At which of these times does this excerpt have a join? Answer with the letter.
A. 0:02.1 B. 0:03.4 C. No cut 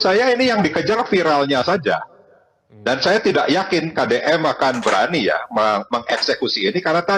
C